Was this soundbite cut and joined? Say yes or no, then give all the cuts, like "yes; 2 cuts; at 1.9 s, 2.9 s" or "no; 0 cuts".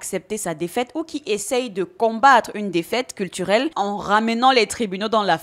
yes; 1 cut; at 3.7 s